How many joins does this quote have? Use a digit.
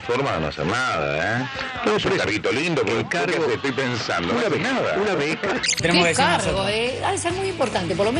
1